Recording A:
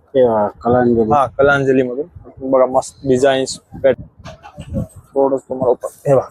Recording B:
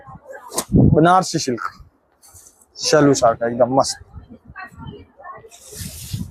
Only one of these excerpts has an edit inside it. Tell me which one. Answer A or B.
A